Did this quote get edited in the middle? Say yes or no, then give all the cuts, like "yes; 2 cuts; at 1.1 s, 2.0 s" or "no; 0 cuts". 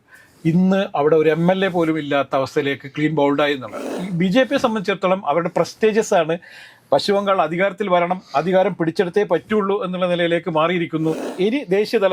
yes; 2 cuts; at 3.9 s, 11.3 s